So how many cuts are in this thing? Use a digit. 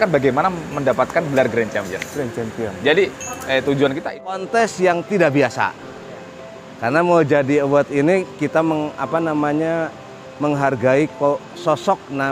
1